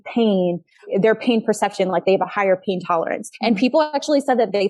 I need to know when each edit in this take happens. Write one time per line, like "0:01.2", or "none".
0:03.3

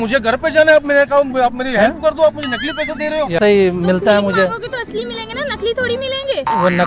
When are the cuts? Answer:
0:03.4

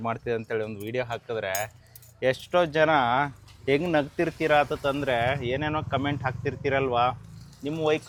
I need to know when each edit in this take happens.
none

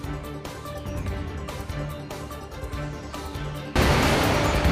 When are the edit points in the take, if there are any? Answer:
0:02.0
0:03.1

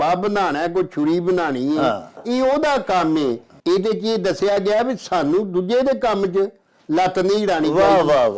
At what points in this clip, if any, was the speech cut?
0:03.5

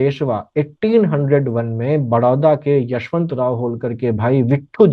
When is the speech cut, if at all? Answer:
none

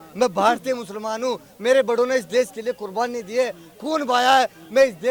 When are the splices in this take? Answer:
none

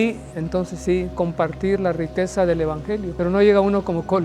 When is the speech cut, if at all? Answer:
0:03.1

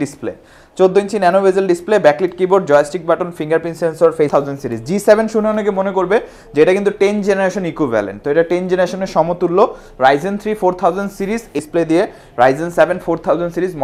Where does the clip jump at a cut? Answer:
0:04.3
0:11.6

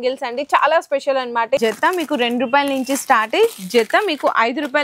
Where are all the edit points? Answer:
0:01.6

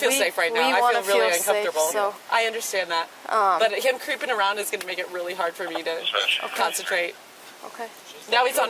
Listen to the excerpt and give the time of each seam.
none

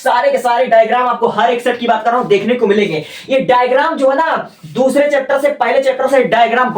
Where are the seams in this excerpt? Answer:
none

